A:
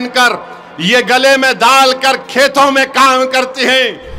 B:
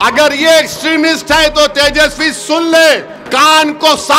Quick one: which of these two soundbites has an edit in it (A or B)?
B